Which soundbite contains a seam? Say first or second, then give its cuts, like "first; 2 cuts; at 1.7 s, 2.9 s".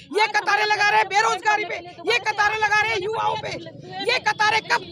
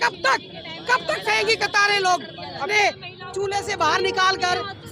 second; 1 cut; at 2.7 s